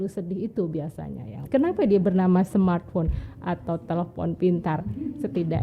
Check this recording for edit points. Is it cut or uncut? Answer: cut